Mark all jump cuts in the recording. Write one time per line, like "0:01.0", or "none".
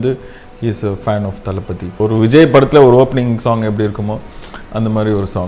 0:02.0